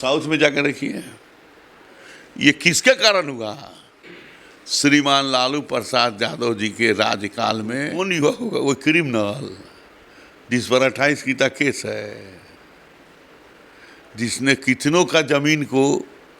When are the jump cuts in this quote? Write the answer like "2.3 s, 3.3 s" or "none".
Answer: 7.9 s